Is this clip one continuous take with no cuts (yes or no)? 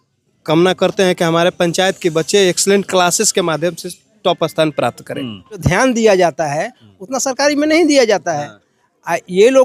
no